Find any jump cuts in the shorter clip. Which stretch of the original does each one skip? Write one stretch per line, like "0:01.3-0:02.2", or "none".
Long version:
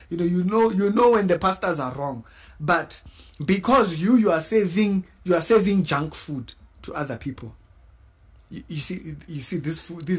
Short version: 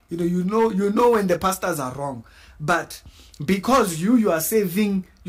none

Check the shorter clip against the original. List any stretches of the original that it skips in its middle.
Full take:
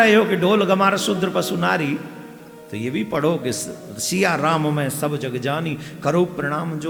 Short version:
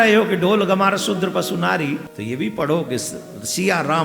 0:02.1-0:02.7

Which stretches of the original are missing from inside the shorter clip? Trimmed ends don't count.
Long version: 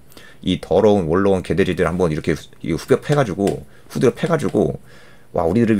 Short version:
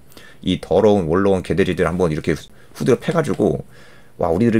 0:02.5-0:03.7

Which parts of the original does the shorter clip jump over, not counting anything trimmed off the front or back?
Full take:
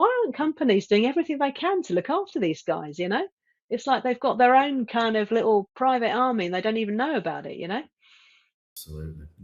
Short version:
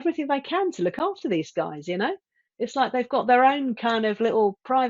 none

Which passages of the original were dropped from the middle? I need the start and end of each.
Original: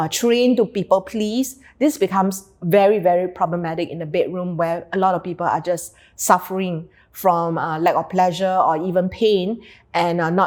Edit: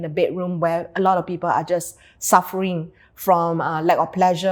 none

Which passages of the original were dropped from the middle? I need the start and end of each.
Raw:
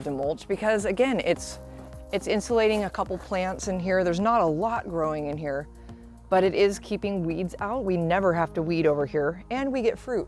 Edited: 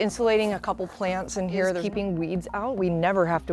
0:04.1-0:06.9

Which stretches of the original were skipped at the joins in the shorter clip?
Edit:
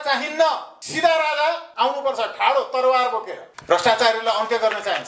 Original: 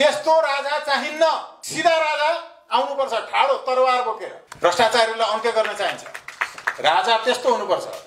0:02.5-0:02.6

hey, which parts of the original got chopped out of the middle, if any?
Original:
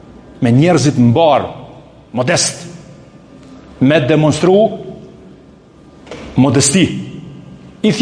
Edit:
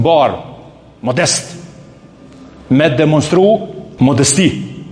0:04.9-0:06.2

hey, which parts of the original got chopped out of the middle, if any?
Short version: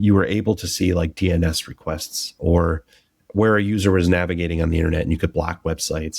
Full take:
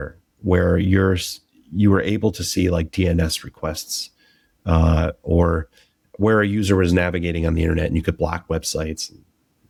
0:04.1-0:05.2

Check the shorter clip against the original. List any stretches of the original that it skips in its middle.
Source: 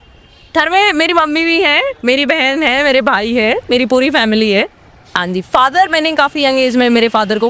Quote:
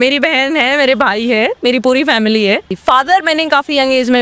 0:04.8-0:05.4

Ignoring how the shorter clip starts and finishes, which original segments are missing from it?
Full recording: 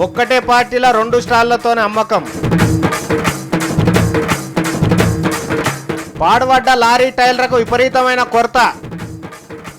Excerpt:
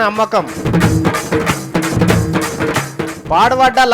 0:03.8-0:04.9

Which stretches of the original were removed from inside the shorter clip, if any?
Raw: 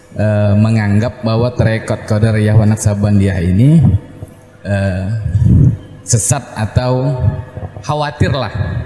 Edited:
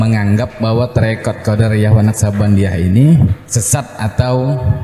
0:04.1-0:06.1

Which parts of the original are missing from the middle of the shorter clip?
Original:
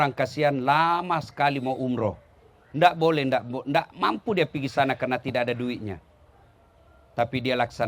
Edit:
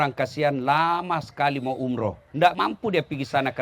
0:02.5-0:03.9

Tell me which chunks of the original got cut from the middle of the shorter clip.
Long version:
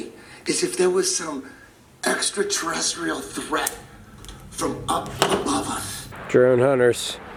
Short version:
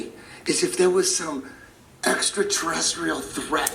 none

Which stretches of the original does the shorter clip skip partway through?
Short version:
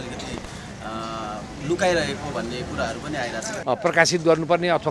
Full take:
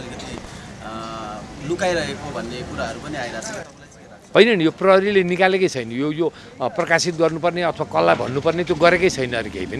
0:03.5-0:06.5

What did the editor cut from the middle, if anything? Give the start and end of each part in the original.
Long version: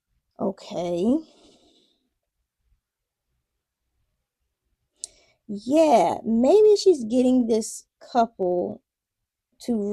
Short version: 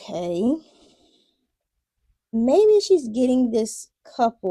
0:02.9-0:06.2

